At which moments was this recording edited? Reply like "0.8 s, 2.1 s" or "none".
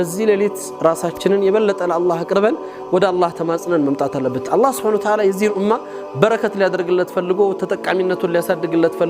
4.4 s